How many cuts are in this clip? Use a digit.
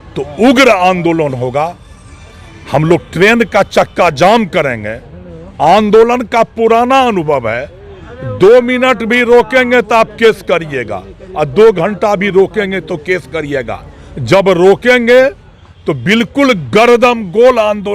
0